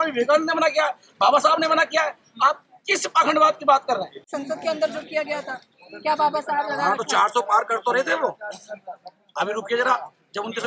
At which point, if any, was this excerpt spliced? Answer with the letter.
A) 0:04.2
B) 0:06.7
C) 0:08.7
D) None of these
A